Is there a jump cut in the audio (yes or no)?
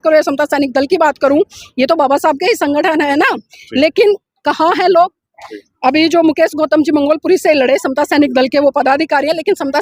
no